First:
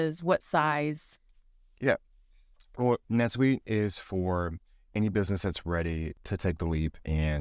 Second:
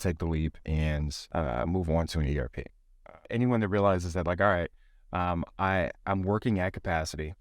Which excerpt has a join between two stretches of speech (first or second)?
second